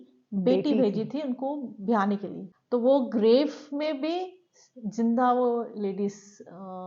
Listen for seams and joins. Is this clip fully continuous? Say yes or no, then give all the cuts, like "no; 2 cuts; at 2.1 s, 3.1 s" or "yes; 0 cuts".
no; 1 cut; at 2.4 s